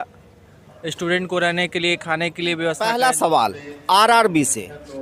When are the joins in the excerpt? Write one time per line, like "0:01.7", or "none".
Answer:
0:02.8